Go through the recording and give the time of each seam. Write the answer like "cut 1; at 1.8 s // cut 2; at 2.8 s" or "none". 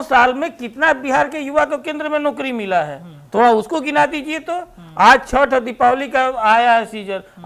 none